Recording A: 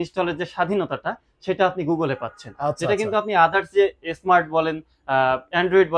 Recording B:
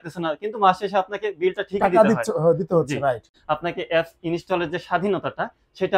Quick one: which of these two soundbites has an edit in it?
B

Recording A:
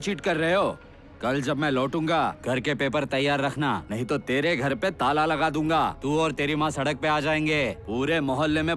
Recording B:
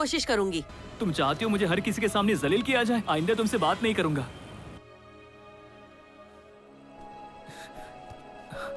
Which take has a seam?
A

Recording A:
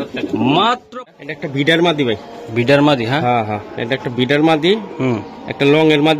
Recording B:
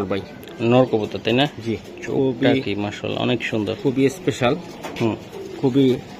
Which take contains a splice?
A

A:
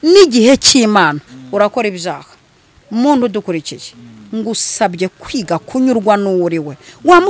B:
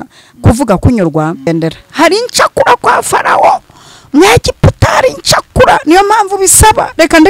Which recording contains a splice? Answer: B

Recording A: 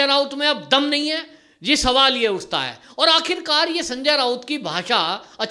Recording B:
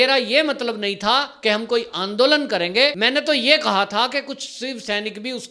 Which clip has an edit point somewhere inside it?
B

